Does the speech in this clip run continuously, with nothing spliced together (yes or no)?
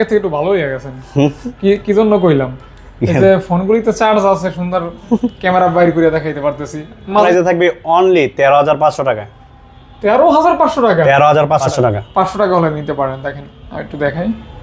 no